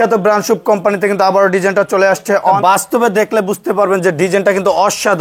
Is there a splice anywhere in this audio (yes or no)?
yes